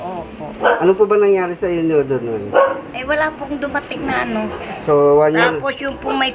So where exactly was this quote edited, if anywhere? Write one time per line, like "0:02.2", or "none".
0:04.7

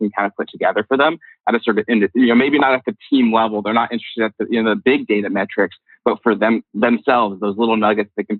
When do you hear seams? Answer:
none

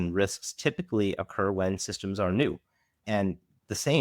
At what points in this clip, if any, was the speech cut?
0:03.0

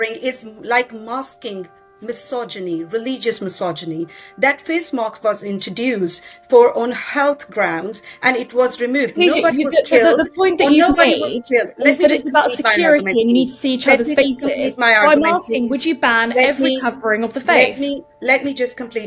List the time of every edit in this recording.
none

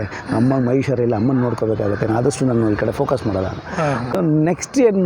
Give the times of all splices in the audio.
0:04.0

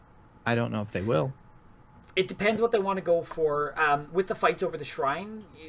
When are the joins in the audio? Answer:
0:03.3

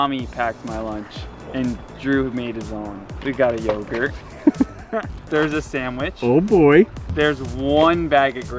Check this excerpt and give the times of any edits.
0:03.1
0:05.2
0:07.0

